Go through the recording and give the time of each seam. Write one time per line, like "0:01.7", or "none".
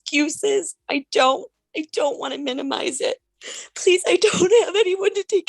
0:03.3